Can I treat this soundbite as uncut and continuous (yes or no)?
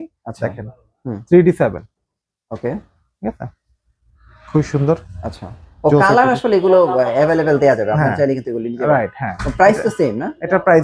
yes